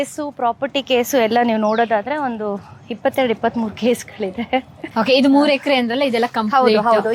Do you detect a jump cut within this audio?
yes; 1 cut; at 4.8 s

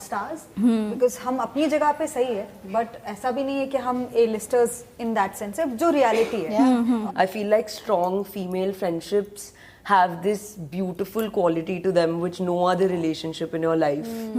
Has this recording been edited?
yes; 1 cut; at 7.0 s

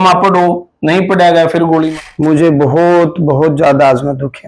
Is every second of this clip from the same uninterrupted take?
no; 1 cut; at 1.9 s

